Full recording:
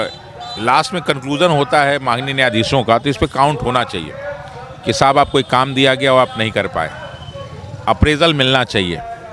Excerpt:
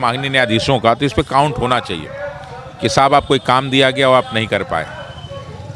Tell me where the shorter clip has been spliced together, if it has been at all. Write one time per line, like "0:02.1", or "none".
none